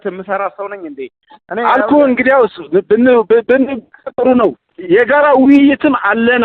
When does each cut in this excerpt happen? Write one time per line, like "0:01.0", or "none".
0:04.7